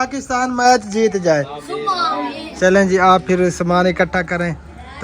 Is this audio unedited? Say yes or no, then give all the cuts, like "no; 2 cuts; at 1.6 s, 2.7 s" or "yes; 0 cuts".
no; 1 cut; at 2.4 s